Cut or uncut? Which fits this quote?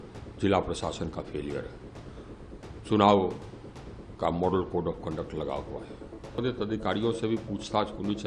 cut